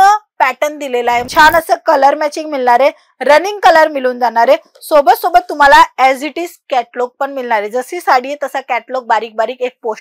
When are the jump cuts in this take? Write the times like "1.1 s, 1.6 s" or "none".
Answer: 1.3 s